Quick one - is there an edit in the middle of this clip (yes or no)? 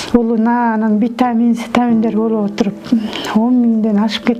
no